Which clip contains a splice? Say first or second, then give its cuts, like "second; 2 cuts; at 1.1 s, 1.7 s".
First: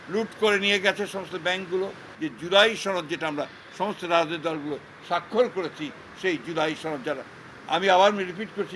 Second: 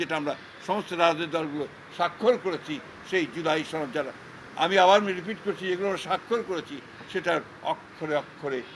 first; 1 cut; at 2.1 s